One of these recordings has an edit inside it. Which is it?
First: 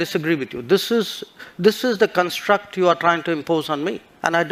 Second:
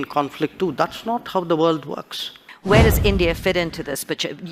second; 1 cut; at 2.5 s

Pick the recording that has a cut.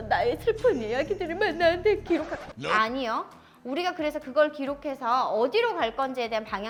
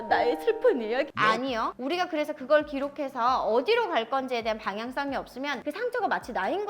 second; 2 cuts; at 1.2 s, 5.6 s

